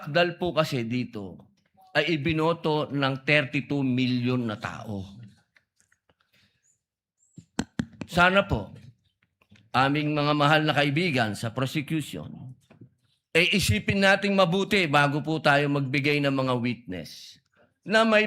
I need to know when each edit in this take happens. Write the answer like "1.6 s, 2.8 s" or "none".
none